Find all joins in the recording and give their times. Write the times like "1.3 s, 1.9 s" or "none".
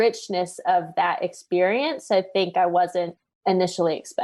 3.2 s